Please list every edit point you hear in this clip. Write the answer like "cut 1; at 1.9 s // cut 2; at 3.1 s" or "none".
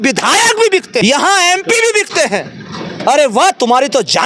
cut 1; at 1.0 s